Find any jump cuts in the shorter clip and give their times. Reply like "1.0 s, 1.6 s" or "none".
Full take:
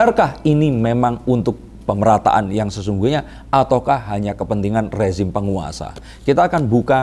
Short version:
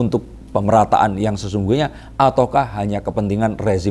none